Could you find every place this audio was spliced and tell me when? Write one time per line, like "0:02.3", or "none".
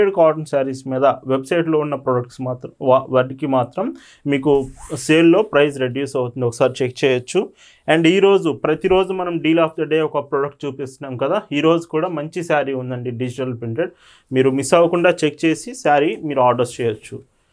none